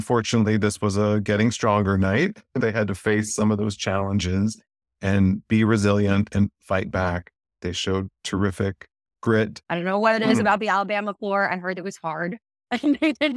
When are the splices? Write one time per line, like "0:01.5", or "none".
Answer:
0:02.6
0:07.6
0:09.6